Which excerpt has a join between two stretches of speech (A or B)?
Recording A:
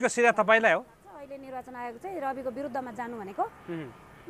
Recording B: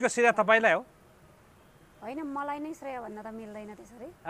A